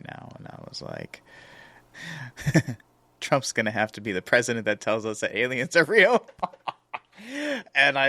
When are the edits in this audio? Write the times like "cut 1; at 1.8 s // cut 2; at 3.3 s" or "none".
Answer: cut 1; at 1.8 s